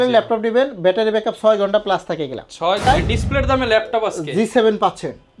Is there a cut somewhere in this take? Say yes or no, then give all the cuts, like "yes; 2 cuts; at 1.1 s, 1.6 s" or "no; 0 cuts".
yes; 1 cut; at 2.8 s